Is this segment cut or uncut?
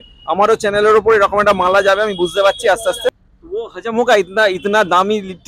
cut